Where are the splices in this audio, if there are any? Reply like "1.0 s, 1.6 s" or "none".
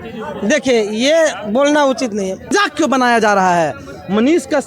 2.5 s